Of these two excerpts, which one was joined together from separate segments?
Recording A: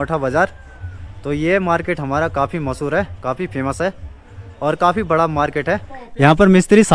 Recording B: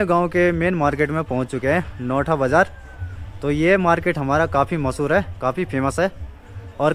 A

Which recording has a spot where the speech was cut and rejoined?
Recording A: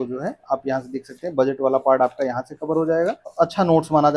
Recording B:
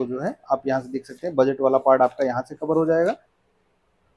A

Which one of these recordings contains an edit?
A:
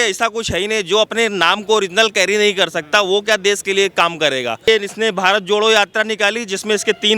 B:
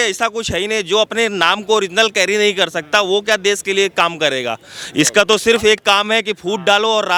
A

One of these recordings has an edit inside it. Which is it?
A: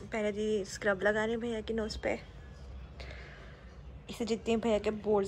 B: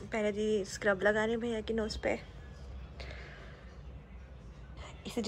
A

